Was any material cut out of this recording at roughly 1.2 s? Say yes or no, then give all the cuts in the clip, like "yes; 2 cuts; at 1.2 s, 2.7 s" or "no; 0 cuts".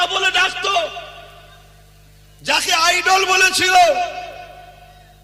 no; 0 cuts